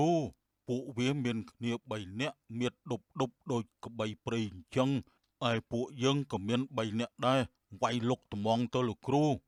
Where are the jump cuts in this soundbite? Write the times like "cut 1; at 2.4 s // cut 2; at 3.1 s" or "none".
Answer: none